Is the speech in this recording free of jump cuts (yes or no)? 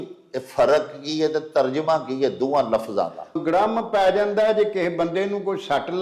no